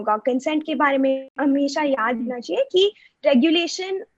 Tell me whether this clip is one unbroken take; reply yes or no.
no